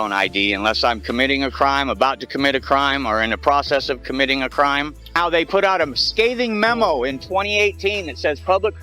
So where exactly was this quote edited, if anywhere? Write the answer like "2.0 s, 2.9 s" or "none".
5.1 s